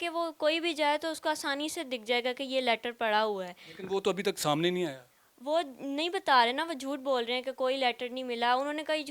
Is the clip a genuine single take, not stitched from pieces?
yes; 0 cuts

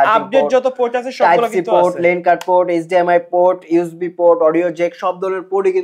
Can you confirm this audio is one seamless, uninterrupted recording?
yes; 0 cuts

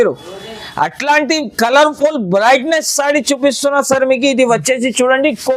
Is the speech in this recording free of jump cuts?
yes; 0 cuts

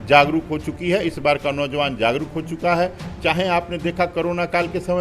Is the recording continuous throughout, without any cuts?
yes; 0 cuts

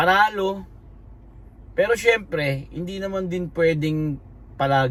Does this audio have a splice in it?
no; 0 cuts

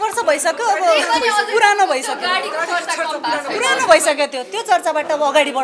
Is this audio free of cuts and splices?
yes; 0 cuts

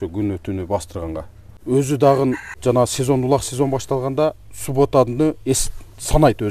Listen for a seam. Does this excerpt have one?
yes; 2 cuts; at 1.6 s, 2.6 s

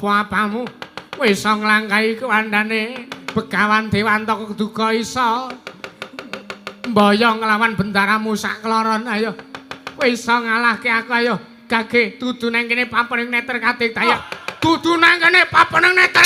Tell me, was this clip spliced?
yes; 1 cut; at 14.1 s

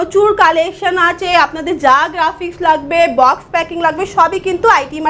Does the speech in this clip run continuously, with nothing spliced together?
yes; 0 cuts

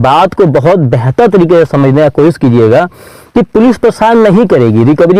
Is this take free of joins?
yes; 0 cuts

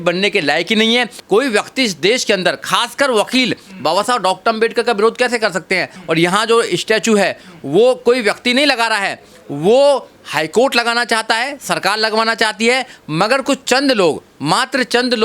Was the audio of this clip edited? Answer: yes; 2 cuts; at 1.1 s, 5.9 s

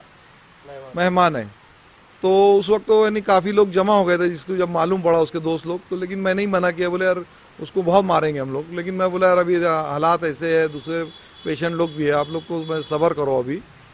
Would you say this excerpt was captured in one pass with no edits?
yes; 0 cuts

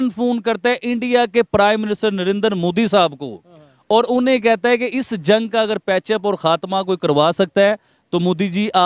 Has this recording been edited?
no; 0 cuts

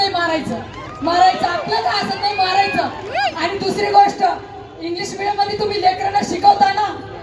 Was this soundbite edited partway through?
no; 0 cuts

